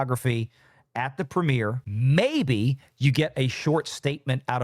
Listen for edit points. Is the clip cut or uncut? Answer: cut